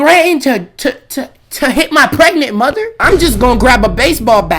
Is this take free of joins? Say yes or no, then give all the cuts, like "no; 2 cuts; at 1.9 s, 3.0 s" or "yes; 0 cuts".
yes; 0 cuts